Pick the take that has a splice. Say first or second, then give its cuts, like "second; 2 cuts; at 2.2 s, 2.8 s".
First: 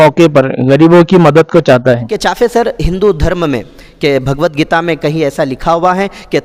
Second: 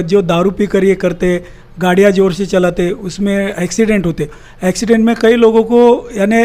first; 1 cut; at 2.1 s